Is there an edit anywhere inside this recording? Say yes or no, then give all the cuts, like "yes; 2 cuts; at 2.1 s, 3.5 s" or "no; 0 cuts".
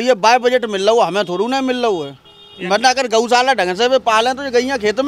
no; 0 cuts